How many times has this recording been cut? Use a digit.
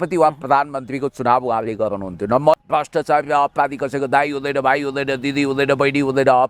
1